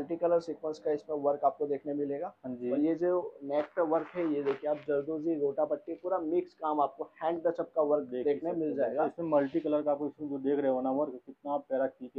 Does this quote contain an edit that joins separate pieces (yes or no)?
no